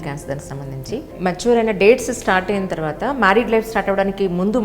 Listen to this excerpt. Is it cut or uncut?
cut